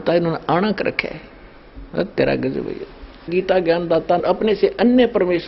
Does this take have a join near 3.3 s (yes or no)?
yes